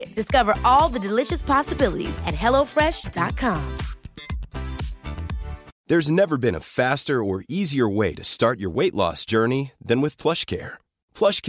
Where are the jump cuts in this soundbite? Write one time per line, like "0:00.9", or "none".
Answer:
0:05.7